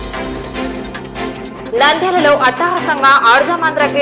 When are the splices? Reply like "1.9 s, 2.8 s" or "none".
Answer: none

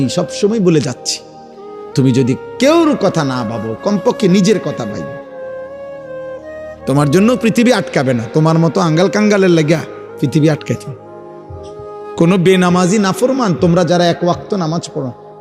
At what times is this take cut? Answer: 5.0 s, 6.5 s

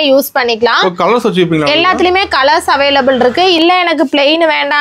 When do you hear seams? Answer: 3.6 s

